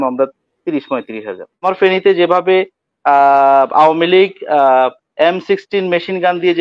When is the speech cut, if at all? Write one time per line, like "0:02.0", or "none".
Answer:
0:01.6